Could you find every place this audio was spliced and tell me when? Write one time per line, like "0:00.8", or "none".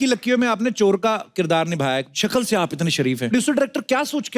0:02.1
0:03.3